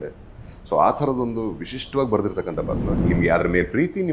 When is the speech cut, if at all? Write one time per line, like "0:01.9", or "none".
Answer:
0:02.9